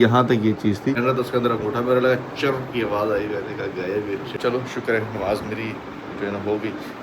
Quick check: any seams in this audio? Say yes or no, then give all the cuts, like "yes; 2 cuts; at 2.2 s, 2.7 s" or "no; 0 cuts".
yes; 2 cuts; at 1.0 s, 4.3 s